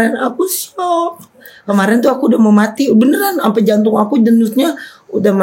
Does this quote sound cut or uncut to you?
cut